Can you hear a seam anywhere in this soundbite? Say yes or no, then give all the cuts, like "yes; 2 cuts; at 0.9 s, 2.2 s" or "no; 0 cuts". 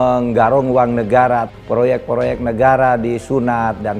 yes; 1 cut; at 1.5 s